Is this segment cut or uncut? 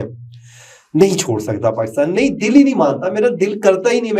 uncut